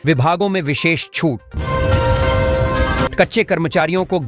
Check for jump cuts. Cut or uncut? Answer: cut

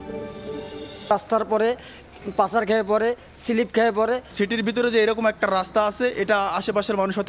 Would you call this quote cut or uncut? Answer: cut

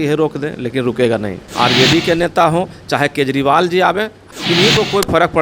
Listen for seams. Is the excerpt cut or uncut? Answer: cut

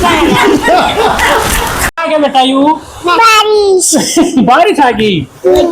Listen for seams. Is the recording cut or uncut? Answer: cut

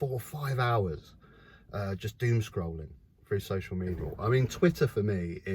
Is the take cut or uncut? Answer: cut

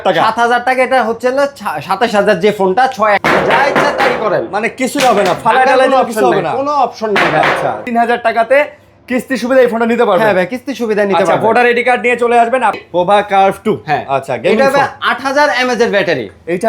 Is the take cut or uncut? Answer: cut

